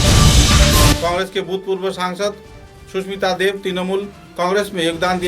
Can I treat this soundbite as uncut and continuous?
no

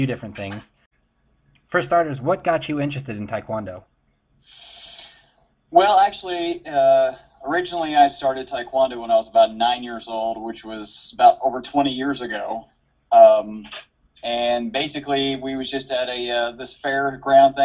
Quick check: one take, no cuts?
no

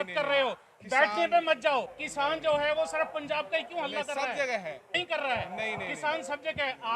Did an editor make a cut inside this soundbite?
yes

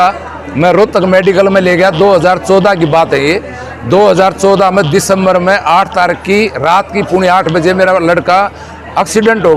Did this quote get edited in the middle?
no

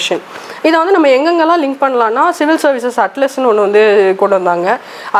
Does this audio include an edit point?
no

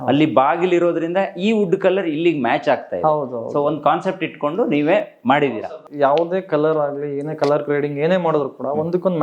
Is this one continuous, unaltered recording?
no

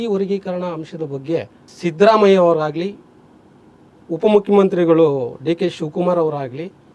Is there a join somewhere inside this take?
yes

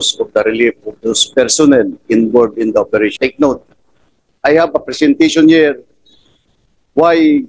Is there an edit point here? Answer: yes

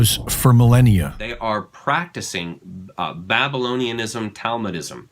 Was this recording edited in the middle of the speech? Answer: yes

